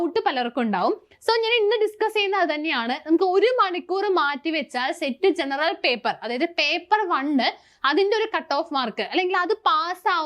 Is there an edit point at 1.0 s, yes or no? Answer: no